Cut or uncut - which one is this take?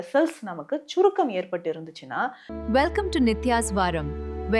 cut